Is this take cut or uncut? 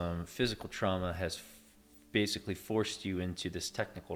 uncut